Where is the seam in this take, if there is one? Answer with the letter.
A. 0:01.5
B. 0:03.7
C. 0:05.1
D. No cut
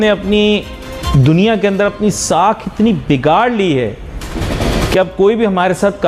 D